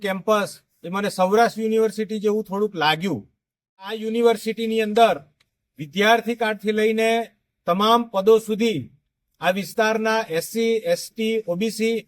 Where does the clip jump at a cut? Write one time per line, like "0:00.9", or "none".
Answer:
0:04.0